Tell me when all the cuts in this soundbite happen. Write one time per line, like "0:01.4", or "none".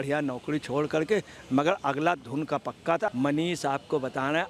0:03.1